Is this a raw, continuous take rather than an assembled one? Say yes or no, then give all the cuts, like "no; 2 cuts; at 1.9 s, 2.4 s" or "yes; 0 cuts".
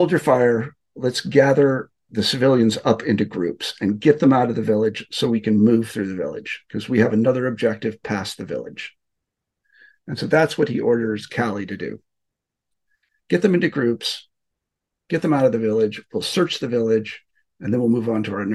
no; 1 cut; at 2.1 s